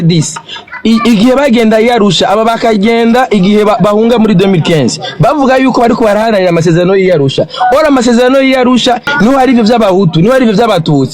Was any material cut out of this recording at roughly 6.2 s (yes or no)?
no